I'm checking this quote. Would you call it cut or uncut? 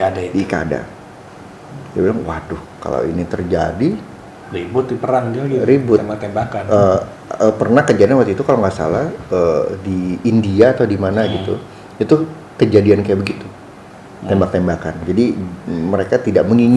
uncut